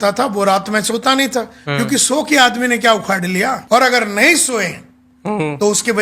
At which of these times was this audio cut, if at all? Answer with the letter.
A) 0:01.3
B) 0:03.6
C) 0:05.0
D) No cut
B